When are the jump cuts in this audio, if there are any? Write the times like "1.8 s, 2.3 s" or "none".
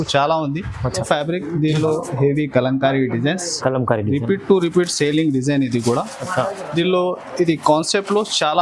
1.0 s